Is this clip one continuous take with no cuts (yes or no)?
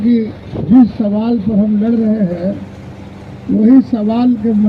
yes